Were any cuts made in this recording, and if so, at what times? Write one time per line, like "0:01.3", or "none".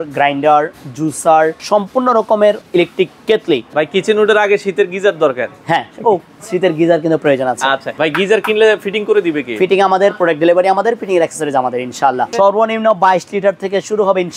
0:01.6
0:02.6
0:03.7
0:07.9
0:12.3